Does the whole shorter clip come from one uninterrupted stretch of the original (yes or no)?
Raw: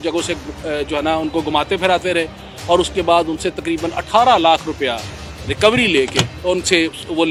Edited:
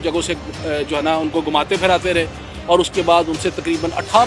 yes